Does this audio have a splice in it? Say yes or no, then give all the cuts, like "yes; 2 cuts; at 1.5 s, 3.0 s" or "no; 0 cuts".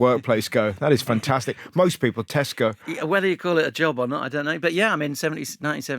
yes; 1 cut; at 2.8 s